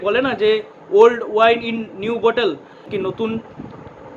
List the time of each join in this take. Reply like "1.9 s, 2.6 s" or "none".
2.7 s